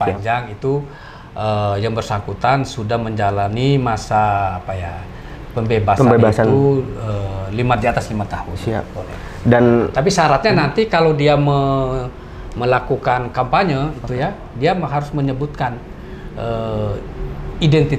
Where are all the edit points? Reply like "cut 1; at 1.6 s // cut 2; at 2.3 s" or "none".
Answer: none